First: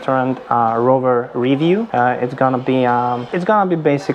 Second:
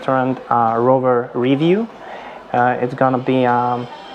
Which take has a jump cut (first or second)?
first